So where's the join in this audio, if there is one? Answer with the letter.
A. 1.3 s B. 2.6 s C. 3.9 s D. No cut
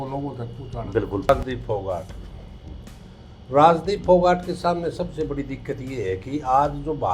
A